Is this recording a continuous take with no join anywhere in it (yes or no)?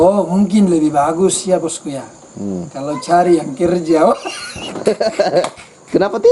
yes